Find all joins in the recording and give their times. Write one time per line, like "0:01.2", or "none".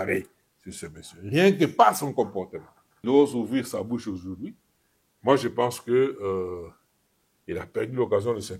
0:02.9